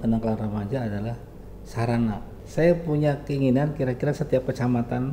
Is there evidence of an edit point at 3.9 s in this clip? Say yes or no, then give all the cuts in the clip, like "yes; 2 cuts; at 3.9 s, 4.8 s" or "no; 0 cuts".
no; 1 cut; at 2.4 s